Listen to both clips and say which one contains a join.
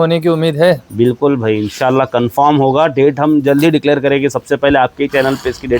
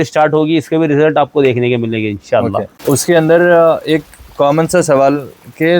second; 1 cut; at 2.7 s

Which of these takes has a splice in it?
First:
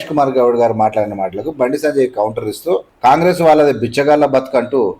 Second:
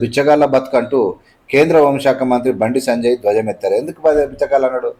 first; 1 cut; at 2.9 s

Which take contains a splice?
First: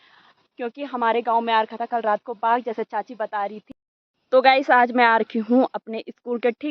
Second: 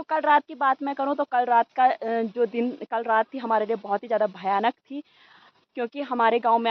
first; 1 cut; at 3.6 s

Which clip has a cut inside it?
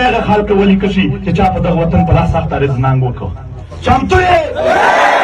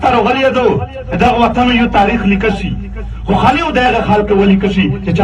second; 1 cut; at 1.0 s

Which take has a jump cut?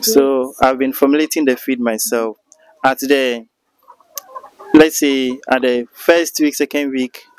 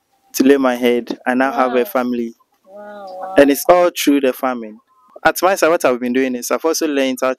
second; 1 cut; at 5.1 s

